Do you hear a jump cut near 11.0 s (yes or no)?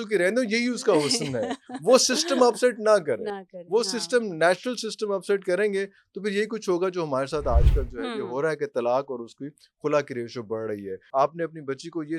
yes